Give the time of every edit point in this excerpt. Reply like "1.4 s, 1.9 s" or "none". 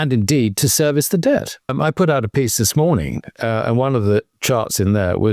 1.7 s, 4.3 s